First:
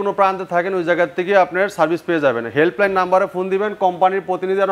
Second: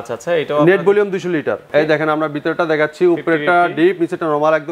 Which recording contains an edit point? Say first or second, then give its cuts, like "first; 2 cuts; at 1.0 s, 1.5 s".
second; 1 cut; at 1.6 s